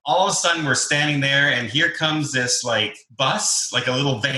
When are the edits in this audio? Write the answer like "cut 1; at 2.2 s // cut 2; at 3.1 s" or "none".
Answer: cut 1; at 3.0 s